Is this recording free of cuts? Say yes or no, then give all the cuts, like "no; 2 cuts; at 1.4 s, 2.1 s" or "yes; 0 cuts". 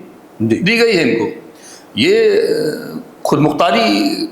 yes; 0 cuts